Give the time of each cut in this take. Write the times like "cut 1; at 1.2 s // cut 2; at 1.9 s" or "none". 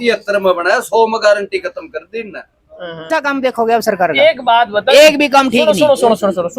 cut 1; at 3.1 s